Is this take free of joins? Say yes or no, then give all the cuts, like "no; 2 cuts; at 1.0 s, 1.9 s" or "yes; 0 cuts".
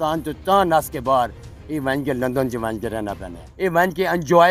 no; 1 cut; at 3.4 s